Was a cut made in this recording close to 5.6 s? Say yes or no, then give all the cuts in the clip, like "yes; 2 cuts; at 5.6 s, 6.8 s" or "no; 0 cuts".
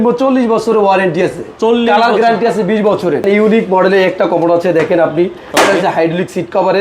no; 1 cut; at 3.2 s